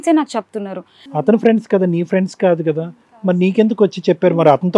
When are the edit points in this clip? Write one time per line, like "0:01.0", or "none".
0:01.3